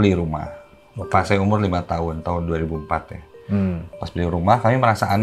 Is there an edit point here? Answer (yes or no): no